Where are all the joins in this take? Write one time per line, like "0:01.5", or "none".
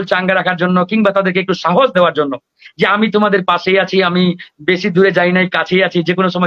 none